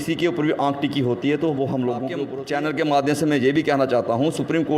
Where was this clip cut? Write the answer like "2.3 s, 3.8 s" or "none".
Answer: 2.3 s